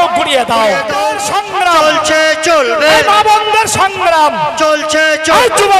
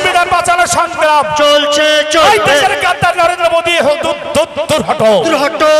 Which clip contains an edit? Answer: first; 1 cut; at 1.2 s

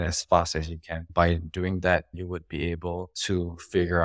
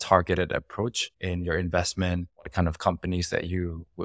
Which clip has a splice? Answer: first; 2 cuts; at 1.1 s, 2.1 s

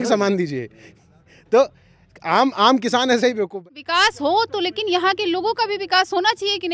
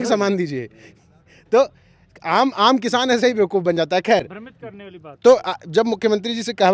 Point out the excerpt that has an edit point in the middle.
first; 1 cut; at 3.5 s

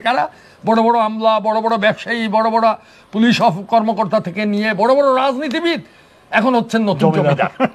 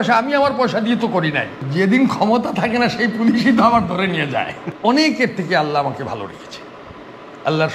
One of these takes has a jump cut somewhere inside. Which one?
second; 2 cuts; at 1.7 s, 4.6 s

